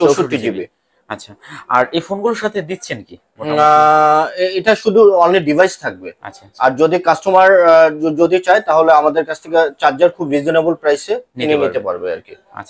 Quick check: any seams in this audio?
no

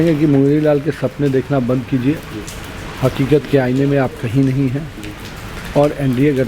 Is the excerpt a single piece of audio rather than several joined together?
yes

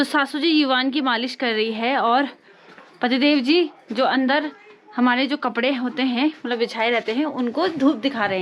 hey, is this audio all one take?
yes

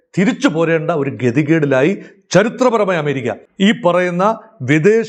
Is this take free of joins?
no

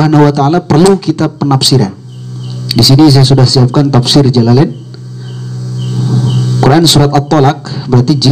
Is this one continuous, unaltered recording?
yes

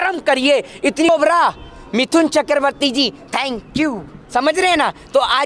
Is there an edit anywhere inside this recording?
yes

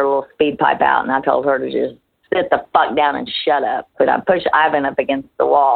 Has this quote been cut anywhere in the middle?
yes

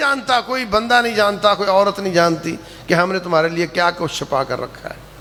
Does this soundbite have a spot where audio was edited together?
no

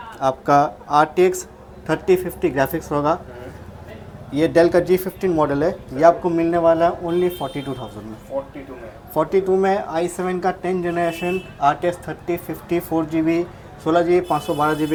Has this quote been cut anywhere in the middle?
no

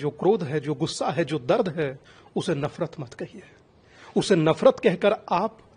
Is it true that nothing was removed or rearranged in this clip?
yes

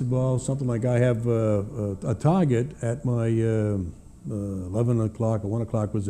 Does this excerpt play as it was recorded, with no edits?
yes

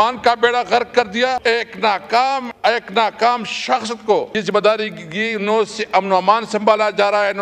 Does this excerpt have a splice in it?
yes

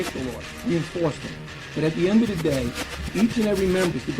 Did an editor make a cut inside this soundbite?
yes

